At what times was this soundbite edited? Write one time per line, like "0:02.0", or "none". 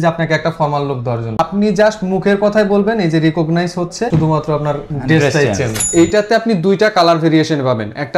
0:01.4
0:04.1
0:05.7